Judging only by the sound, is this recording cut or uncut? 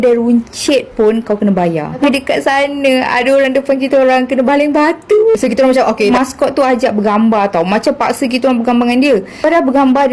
cut